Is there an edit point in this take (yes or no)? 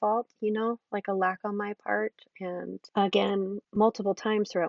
yes